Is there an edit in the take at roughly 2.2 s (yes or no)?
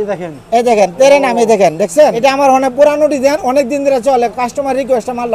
yes